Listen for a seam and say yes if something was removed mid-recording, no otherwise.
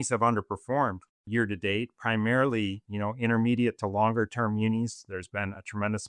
yes